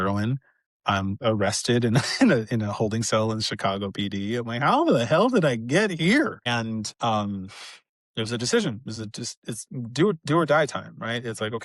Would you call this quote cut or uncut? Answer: cut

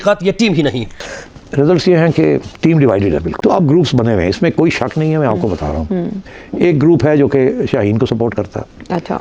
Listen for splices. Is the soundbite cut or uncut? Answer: cut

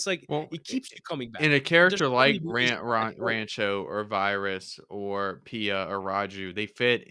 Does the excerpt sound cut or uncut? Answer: uncut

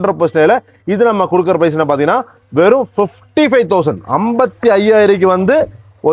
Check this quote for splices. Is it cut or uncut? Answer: uncut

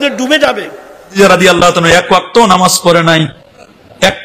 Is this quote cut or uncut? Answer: cut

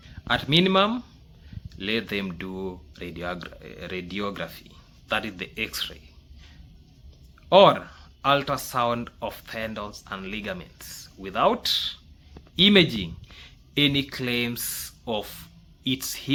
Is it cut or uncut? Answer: uncut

